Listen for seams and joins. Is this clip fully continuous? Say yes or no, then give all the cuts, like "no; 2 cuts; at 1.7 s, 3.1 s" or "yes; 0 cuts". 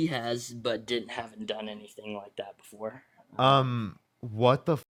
yes; 0 cuts